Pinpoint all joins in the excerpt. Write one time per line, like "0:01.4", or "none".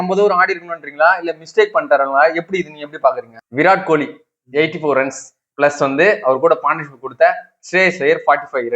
0:03.5